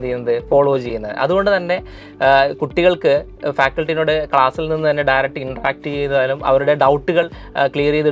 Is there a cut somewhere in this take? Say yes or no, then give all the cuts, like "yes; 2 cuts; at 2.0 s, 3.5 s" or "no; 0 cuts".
no; 0 cuts